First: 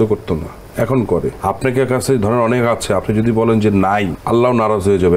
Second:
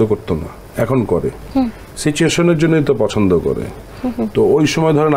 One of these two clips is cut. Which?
first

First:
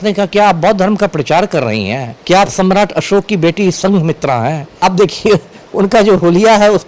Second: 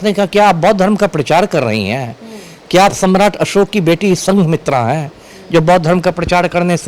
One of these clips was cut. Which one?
first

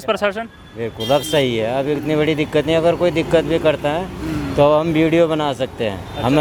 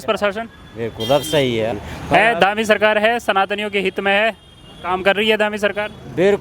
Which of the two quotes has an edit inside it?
second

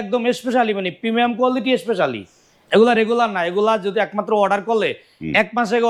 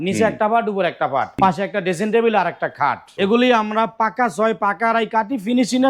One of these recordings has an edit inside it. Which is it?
second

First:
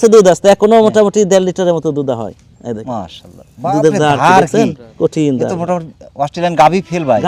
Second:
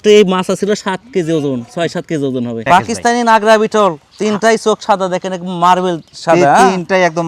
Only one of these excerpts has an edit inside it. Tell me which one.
second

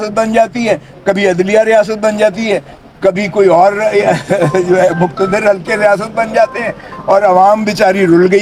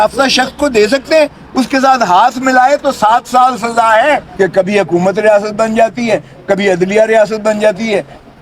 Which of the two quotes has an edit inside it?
second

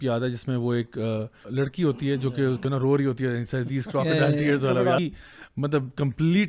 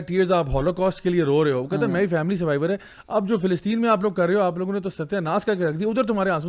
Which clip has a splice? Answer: first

